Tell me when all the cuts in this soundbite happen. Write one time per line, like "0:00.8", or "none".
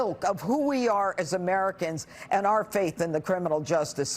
none